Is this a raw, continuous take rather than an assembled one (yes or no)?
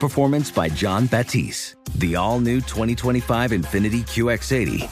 yes